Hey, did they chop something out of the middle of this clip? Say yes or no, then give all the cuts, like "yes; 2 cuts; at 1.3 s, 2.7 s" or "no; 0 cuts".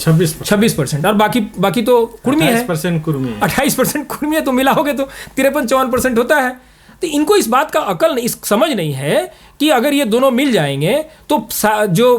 no; 0 cuts